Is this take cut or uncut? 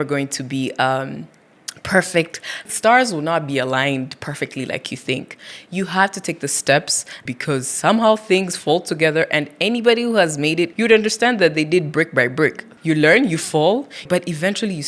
cut